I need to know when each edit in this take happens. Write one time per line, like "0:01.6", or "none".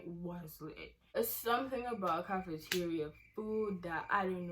0:01.1